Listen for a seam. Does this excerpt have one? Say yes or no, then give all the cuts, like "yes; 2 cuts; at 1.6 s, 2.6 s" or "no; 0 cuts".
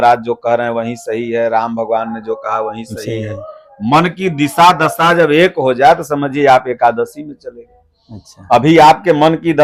no; 0 cuts